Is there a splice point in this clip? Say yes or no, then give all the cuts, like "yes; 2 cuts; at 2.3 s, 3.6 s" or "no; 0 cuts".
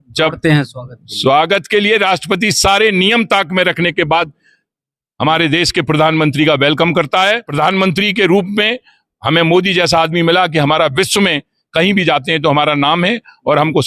yes; 1 cut; at 7.5 s